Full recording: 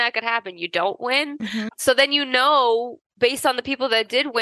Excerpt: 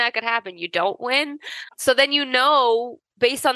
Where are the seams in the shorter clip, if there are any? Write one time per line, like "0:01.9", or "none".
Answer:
none